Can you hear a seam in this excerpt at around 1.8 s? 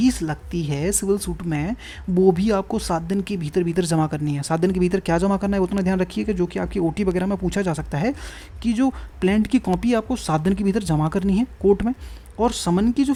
no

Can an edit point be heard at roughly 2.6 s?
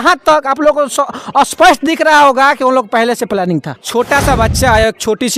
no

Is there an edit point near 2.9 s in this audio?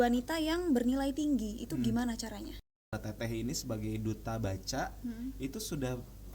yes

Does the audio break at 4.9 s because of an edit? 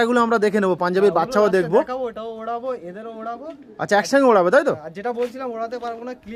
no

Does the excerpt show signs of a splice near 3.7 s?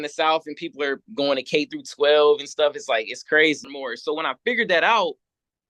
yes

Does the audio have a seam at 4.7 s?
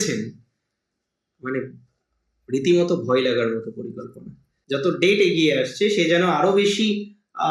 yes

